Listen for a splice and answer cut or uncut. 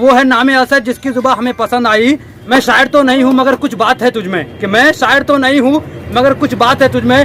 uncut